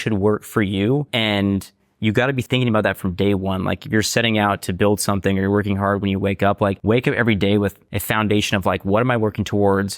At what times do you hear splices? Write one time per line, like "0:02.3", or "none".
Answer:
0:01.1
0:02.4
0:06.8
0:07.9